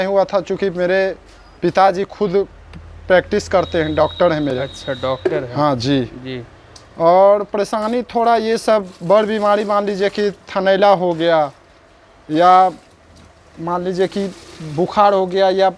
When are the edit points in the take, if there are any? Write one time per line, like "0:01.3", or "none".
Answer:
none